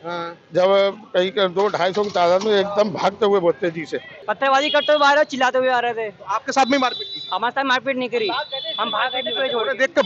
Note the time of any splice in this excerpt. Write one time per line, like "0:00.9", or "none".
0:04.2